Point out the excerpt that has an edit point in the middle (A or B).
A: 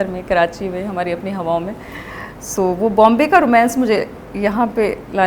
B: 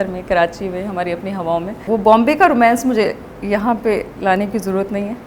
B